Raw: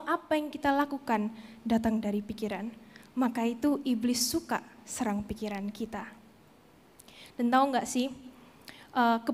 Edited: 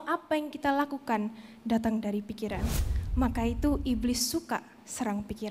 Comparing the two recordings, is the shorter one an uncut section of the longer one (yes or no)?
yes